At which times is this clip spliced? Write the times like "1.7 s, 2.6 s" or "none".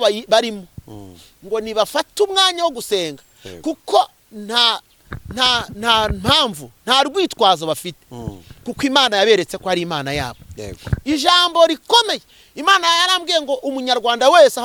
none